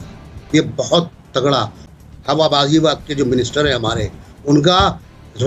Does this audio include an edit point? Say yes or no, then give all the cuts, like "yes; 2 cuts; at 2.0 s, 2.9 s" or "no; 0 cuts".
yes; 1 cut; at 1.8 s